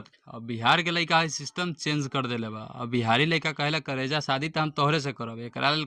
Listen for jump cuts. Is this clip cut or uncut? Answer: uncut